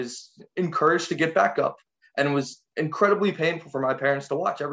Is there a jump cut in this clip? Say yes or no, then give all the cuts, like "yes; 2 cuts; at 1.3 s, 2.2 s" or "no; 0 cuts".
no; 0 cuts